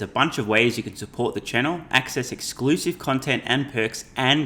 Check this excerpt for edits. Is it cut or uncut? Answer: uncut